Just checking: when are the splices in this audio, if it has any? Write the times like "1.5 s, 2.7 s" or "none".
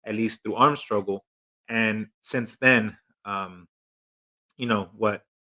none